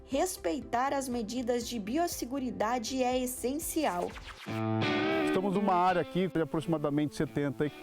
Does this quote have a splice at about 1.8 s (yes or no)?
no